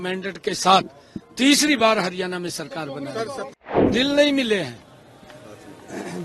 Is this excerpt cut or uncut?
cut